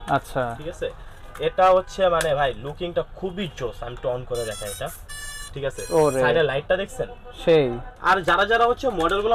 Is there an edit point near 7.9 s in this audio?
yes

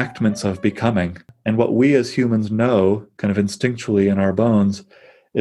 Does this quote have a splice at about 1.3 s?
yes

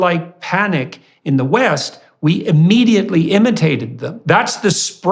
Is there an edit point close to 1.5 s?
no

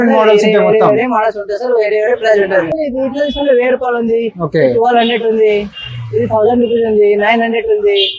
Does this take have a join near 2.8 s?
yes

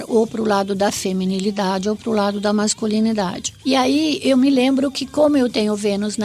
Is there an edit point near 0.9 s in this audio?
no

